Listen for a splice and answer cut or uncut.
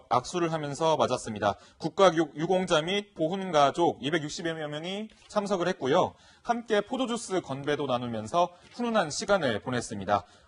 uncut